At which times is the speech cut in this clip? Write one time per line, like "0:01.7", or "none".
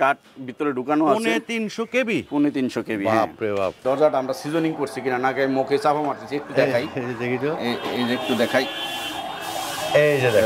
0:03.8